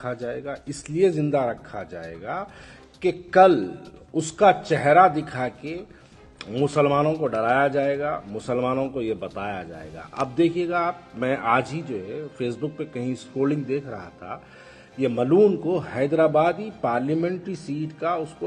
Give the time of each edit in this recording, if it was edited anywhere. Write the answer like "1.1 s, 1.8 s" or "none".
none